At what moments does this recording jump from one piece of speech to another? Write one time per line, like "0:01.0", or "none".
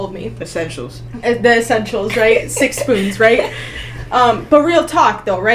none